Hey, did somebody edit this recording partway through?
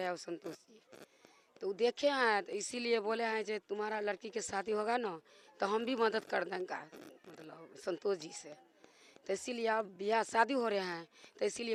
no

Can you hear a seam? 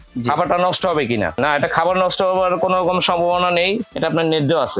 yes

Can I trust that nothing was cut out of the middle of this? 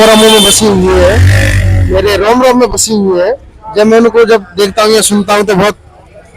yes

